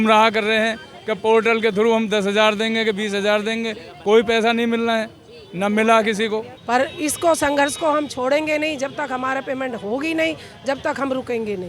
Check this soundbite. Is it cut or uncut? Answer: cut